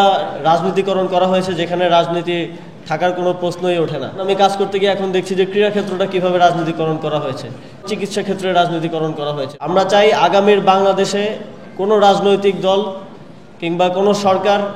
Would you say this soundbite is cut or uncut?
cut